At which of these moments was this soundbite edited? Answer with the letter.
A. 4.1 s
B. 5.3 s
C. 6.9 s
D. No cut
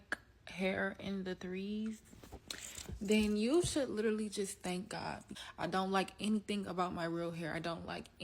B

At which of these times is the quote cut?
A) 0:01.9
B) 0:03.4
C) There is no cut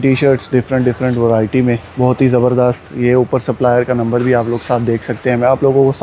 A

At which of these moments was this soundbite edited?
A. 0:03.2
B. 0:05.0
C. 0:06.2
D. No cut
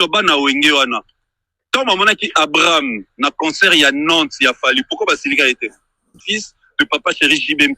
C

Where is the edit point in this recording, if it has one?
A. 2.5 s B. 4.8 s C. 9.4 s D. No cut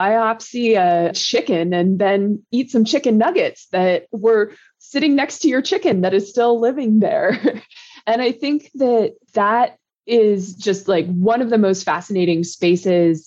A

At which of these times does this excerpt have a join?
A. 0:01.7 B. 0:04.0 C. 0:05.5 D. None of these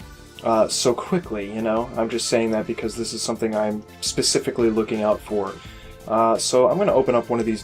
C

